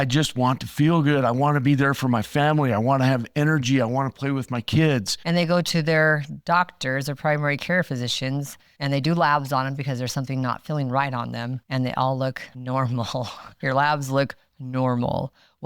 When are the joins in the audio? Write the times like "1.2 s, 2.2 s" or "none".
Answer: 5.1 s, 11.6 s